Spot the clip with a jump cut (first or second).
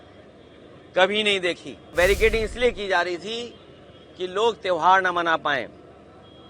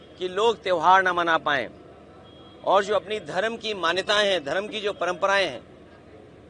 first